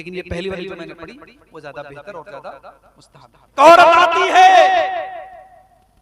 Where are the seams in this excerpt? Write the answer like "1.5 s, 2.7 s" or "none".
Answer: 3.6 s